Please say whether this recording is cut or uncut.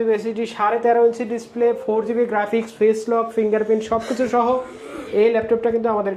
uncut